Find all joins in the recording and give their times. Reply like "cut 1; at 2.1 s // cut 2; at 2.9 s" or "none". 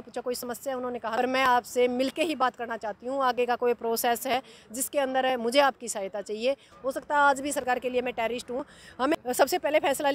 cut 1; at 1.2 s // cut 2; at 6.7 s // cut 3; at 9.2 s